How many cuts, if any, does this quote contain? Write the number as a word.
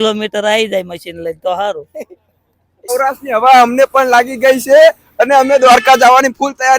one